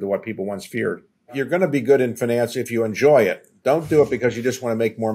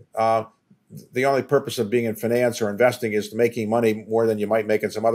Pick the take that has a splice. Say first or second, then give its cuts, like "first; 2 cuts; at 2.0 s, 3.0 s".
first; 1 cut; at 1.4 s